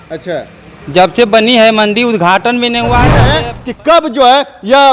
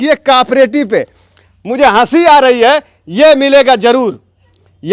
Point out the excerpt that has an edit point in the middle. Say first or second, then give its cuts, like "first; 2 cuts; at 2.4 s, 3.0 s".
first; 1 cut; at 3.3 s